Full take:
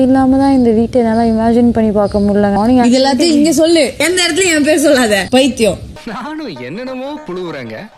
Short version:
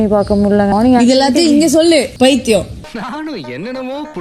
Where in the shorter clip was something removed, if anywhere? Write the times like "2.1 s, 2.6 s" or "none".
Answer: 2.1 s